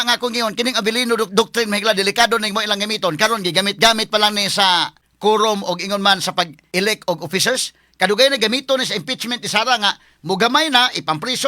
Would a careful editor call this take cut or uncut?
cut